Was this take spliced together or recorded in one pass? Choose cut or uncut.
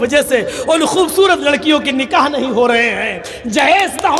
uncut